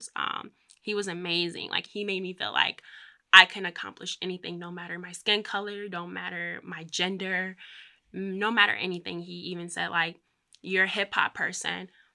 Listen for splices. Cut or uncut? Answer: cut